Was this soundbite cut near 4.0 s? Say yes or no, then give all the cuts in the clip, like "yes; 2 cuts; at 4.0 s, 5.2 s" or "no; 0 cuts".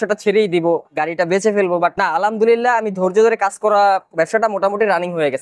yes; 1 cut; at 4.0 s